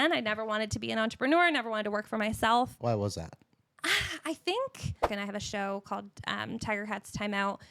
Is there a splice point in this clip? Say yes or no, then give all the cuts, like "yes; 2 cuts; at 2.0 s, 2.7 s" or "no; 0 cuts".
yes; 2 cuts; at 2.8 s, 5.1 s